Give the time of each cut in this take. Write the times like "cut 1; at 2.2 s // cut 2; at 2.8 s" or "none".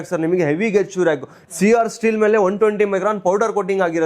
none